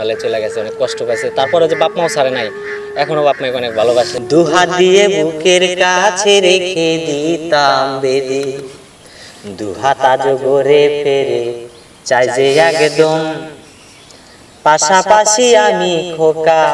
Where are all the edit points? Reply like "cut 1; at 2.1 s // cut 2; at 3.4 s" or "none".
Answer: cut 1; at 4.2 s